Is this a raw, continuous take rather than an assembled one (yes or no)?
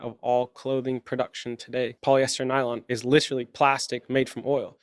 no